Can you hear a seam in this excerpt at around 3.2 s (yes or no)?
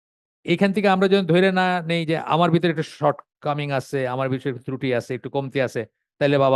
no